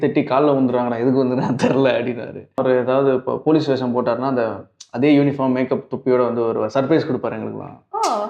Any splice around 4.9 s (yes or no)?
no